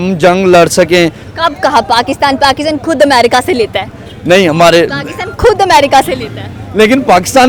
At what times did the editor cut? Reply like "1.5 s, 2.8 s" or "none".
none